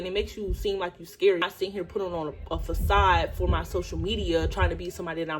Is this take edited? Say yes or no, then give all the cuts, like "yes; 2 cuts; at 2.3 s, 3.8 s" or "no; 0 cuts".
yes; 1 cut; at 1.4 s